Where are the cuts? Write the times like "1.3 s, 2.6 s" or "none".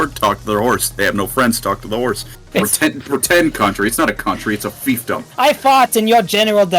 2.3 s, 5.3 s

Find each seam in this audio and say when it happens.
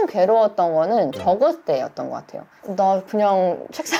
none

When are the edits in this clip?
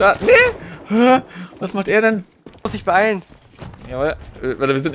2.7 s

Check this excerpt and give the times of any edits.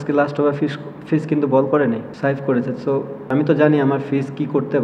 2.1 s, 3.3 s

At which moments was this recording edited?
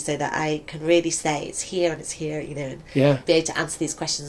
3.2 s

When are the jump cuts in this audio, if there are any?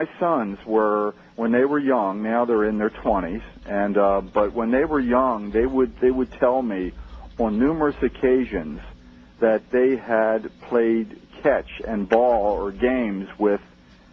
9.5 s

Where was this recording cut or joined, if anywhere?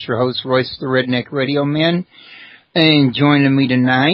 2.5 s

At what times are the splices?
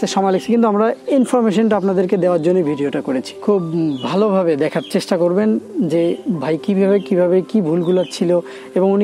3.3 s

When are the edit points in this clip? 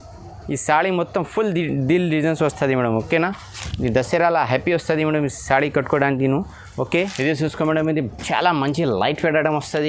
7.1 s

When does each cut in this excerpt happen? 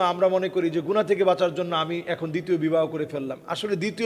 none

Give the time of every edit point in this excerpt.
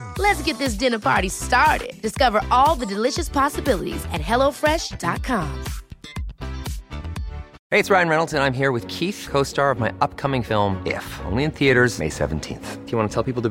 7.5 s

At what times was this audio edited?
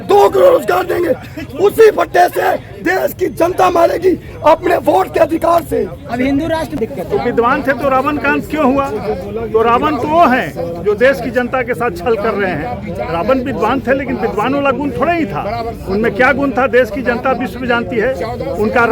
6.8 s

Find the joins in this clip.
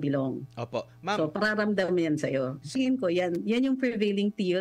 2.7 s

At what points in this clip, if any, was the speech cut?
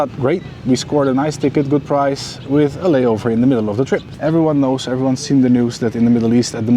4.1 s

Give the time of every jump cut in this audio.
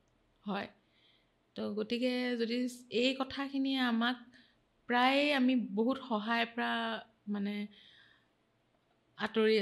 none

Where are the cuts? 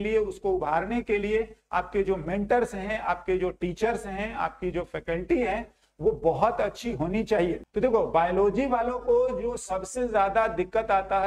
7.6 s

